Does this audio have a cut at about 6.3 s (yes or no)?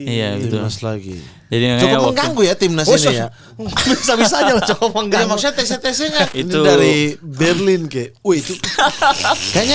yes